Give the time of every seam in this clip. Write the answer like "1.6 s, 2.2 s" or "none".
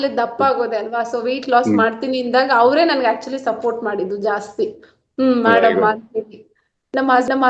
none